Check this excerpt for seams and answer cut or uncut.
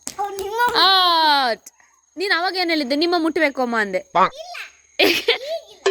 uncut